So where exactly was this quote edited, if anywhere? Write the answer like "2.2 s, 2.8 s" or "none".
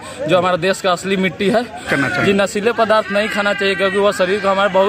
1.8 s